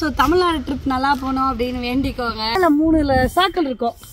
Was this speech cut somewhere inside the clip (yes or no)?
yes